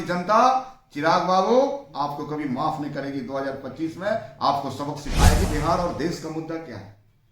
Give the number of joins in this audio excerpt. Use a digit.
1